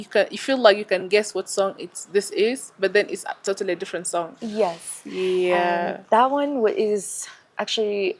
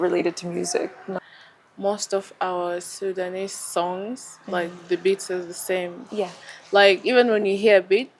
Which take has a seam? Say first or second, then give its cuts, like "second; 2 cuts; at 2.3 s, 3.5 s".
second; 1 cut; at 1.2 s